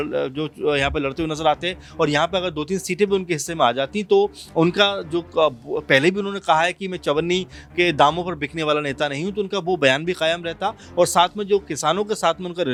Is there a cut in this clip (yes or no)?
no